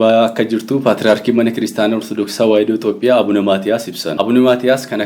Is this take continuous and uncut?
no; 1 cut; at 4.0 s

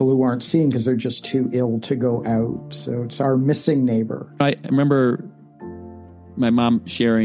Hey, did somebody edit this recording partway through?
no; 0 cuts

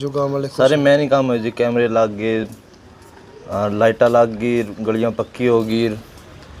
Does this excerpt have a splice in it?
no; 0 cuts

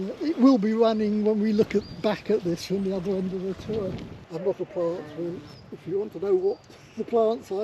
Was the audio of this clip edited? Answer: yes; 1 cut; at 4.1 s

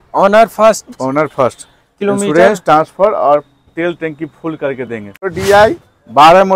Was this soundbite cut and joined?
yes; 1 cut; at 5.2 s

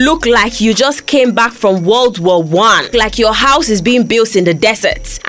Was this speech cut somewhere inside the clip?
yes; 1 cut; at 2.9 s

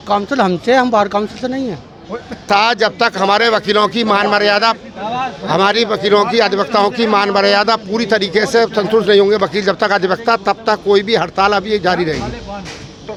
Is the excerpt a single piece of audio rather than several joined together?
yes; 0 cuts

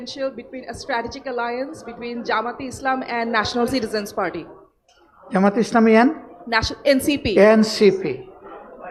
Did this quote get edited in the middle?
no; 0 cuts

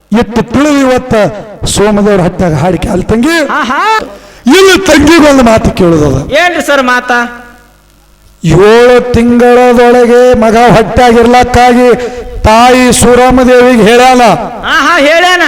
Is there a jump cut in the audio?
yes; 1 cut; at 4.1 s

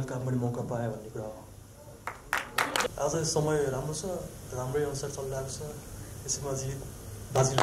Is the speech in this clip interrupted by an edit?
yes; 1 cut; at 2.9 s

